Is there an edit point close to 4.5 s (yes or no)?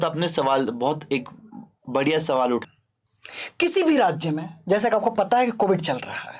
no